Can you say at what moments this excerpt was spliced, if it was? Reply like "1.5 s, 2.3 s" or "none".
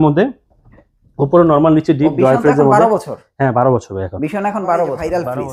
none